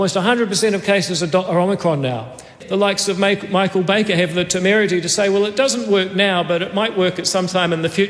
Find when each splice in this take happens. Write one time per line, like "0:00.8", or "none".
0:02.6